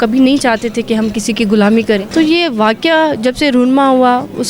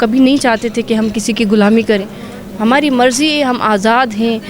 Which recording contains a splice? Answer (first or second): first